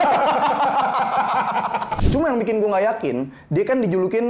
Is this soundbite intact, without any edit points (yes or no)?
no